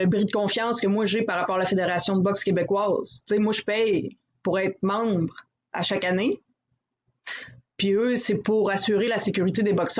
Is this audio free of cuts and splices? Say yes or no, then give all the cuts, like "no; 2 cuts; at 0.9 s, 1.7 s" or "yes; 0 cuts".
yes; 0 cuts